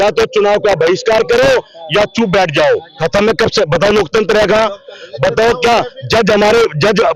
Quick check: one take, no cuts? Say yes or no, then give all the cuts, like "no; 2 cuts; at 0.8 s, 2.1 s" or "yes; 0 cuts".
no; 1 cut; at 2.9 s